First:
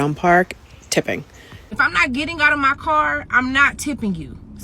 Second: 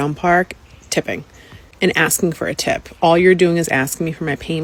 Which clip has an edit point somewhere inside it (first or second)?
first